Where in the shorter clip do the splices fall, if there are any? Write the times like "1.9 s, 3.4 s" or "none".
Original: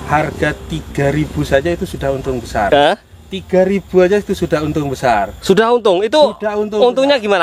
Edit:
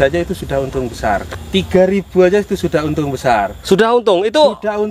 1.2 s